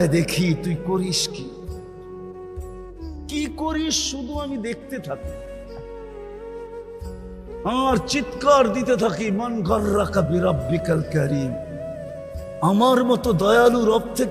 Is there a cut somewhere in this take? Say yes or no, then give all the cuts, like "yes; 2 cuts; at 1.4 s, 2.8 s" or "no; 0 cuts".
no; 0 cuts